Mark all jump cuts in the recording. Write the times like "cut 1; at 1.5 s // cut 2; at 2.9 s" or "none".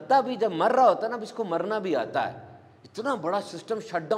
none